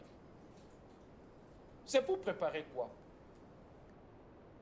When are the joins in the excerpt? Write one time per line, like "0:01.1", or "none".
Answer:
0:03.1